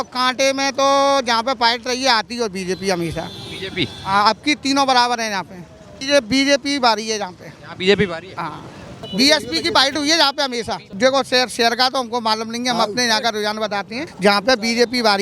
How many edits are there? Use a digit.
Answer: 4